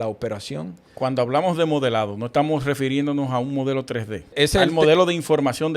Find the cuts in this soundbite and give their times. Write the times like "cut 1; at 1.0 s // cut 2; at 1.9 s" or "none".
cut 1; at 4.3 s